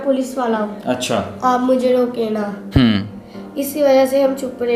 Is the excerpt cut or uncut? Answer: uncut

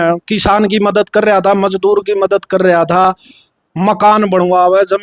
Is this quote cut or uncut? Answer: uncut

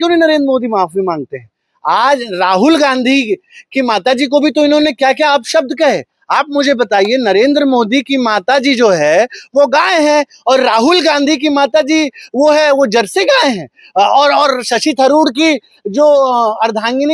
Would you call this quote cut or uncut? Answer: uncut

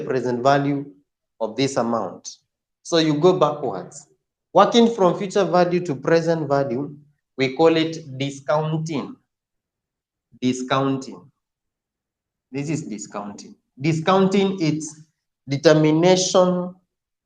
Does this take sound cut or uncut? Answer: cut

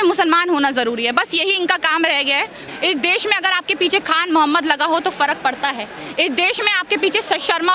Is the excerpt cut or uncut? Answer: cut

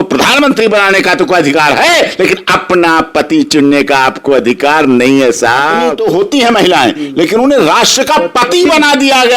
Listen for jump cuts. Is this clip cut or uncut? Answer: cut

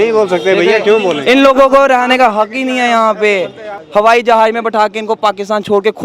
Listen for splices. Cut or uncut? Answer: cut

